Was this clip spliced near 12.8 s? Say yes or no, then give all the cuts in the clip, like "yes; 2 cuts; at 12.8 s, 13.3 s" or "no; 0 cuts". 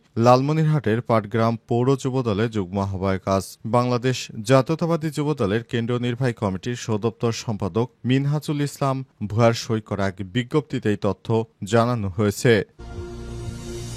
yes; 1 cut; at 12.8 s